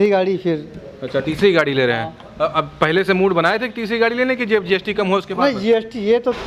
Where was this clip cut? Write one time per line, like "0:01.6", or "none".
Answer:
none